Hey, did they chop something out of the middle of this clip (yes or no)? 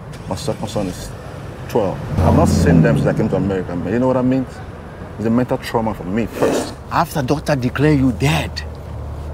yes